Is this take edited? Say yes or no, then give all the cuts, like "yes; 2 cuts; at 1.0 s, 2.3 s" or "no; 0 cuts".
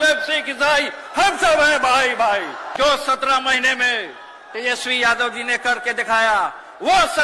yes; 1 cut; at 2.8 s